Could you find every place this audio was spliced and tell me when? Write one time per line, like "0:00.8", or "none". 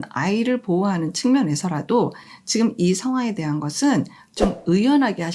none